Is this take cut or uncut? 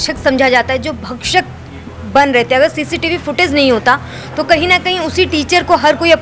uncut